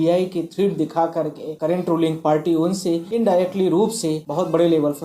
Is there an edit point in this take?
yes; 3 cuts; at 1.4 s, 3.1 s, 4.2 s

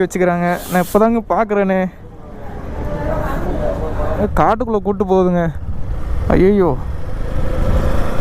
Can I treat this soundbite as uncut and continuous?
no; 1 cut; at 4.2 s

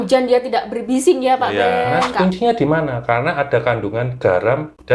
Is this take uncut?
no; 1 cut; at 2.1 s

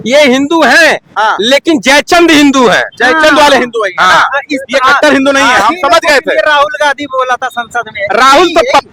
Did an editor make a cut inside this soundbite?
no; 0 cuts

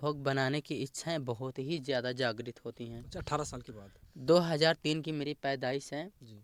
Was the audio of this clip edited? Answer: no; 0 cuts

